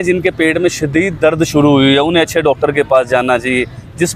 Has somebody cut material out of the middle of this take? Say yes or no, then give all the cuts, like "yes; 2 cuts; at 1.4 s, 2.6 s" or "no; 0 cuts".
no; 0 cuts